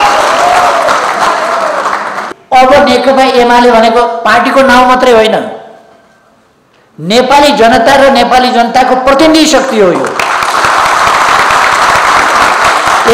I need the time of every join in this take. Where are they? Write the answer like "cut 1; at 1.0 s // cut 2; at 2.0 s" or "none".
cut 1; at 2.1 s